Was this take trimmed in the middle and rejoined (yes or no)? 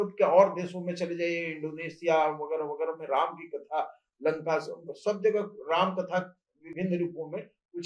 no